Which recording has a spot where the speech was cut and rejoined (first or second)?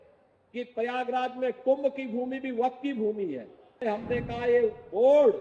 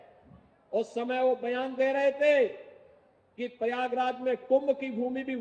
first